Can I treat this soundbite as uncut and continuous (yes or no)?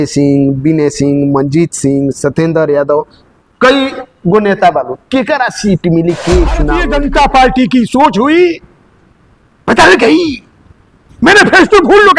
no